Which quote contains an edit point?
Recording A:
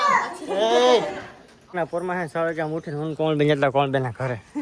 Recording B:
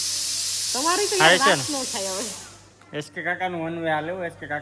A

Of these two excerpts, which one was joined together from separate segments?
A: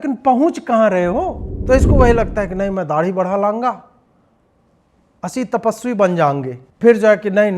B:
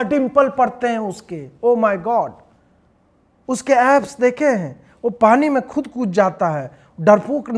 A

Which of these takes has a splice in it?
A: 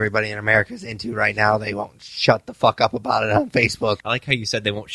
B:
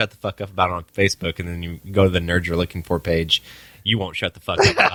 A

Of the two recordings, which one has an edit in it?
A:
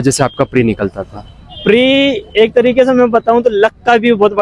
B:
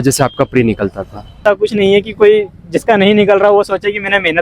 B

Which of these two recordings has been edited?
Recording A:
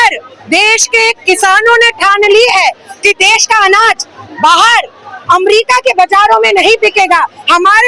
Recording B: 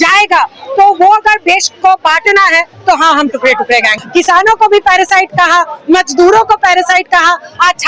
B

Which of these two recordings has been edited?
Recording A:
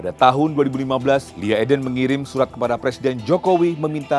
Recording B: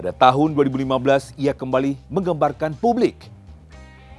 A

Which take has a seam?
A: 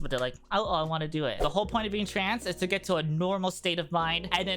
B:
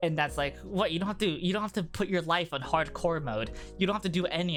A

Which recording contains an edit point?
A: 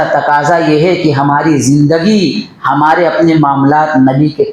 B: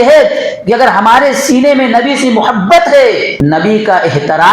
B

